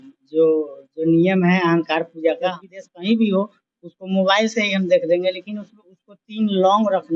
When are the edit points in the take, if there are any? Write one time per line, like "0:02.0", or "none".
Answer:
0:02.5